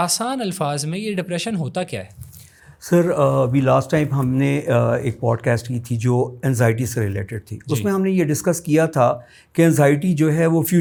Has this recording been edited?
no; 0 cuts

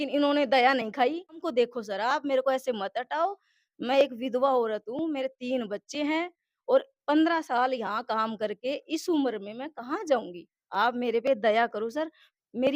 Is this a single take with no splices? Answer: no; 1 cut; at 1.5 s

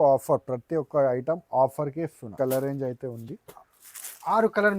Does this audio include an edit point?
yes; 1 cut; at 2.3 s

